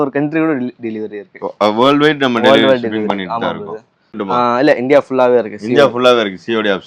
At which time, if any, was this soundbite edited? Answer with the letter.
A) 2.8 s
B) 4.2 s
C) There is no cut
B